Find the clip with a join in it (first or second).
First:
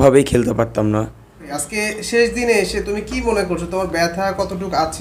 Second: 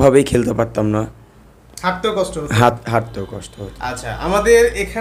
first